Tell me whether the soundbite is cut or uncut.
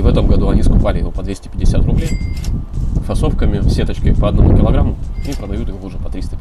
uncut